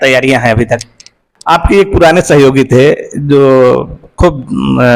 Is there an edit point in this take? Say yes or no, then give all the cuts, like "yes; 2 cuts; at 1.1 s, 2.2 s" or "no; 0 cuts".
yes; 1 cut; at 1.6 s